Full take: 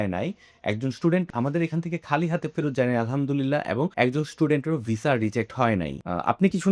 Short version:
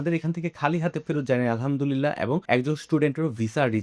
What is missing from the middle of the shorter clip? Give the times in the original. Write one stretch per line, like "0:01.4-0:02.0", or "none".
none